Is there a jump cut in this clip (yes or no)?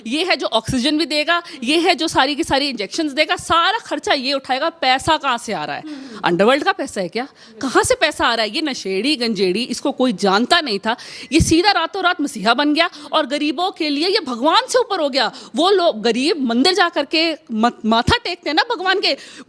no